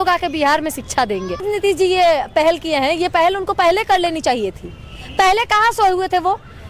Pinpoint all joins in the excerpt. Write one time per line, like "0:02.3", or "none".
0:01.4